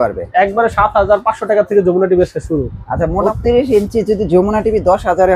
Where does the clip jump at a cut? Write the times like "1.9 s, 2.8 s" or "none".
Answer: 3.2 s